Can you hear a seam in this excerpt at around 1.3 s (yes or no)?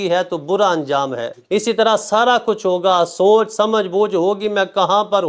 yes